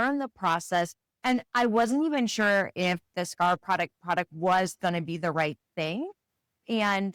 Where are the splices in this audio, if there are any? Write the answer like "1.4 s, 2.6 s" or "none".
none